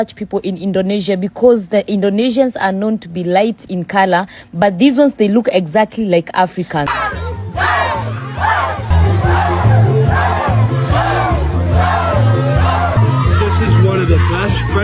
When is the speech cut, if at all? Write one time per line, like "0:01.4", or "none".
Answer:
0:06.9